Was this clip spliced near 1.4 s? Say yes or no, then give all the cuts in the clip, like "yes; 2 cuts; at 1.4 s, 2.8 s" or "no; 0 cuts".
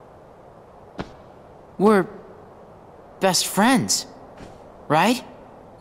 no; 0 cuts